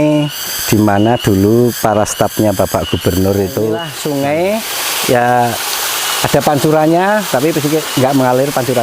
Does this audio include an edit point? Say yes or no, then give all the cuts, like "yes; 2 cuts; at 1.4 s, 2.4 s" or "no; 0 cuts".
yes; 1 cut; at 3.9 s